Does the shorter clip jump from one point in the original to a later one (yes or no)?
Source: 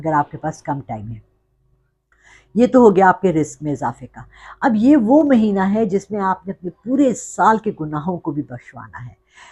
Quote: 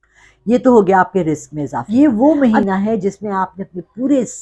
yes